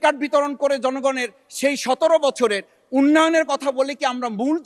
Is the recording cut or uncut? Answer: uncut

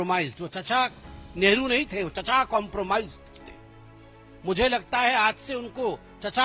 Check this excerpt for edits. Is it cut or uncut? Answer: cut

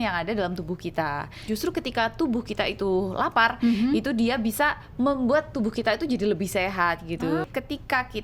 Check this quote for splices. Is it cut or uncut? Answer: cut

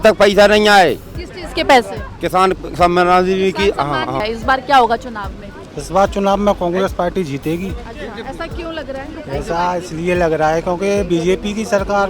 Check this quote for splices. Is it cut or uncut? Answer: cut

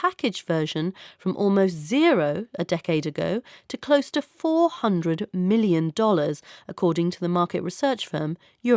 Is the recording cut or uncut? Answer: uncut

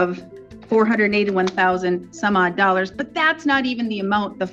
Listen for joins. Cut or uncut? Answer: uncut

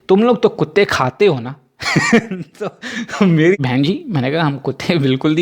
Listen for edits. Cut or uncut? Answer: cut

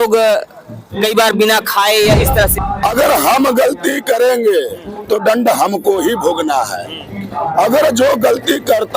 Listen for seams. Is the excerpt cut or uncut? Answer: cut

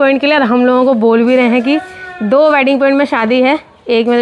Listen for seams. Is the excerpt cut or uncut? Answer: uncut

